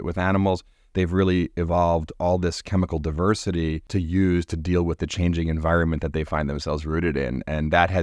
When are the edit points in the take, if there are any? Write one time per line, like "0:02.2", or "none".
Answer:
0:03.8